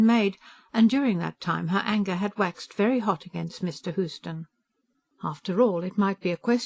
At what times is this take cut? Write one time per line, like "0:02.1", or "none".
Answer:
none